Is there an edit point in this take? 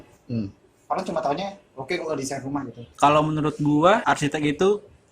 yes; 2 cuts; at 2.8 s, 4.0 s

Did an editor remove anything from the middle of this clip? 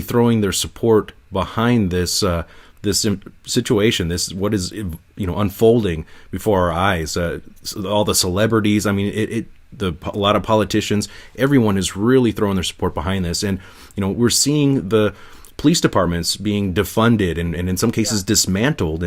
no; 0 cuts

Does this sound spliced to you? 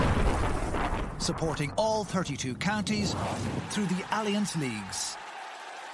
no; 0 cuts

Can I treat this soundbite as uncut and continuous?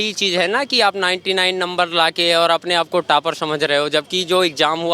yes; 0 cuts

